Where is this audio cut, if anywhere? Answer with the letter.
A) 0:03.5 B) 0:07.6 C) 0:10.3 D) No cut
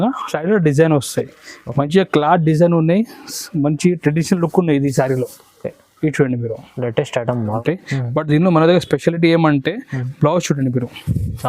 B